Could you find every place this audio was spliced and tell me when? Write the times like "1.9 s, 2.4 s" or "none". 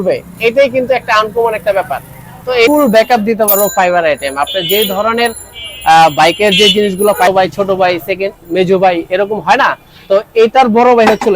2.7 s, 7.3 s